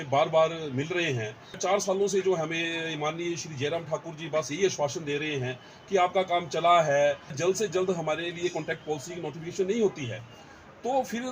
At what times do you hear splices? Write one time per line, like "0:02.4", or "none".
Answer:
0:01.6
0:07.4